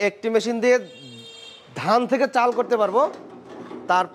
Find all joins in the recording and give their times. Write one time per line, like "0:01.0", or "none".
none